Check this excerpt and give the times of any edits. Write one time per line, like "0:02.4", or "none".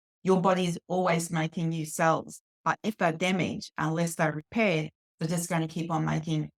none